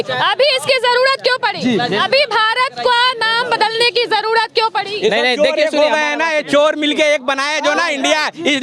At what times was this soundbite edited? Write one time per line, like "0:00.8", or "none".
none